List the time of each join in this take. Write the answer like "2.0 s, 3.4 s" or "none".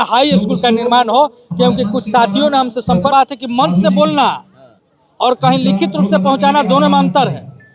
3.1 s